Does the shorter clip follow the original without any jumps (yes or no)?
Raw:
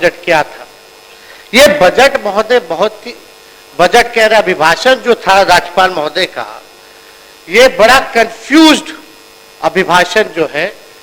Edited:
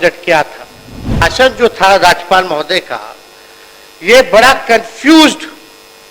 no